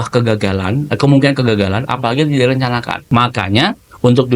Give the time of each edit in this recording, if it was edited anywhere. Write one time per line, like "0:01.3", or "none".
0:03.0